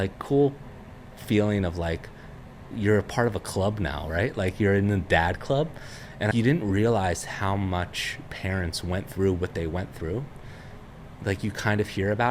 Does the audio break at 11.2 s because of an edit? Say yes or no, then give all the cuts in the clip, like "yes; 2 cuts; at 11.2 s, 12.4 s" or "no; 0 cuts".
no; 2 cuts; at 2.7 s, 6.3 s